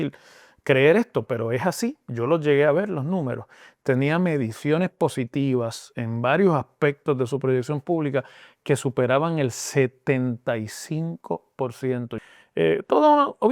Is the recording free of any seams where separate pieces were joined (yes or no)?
no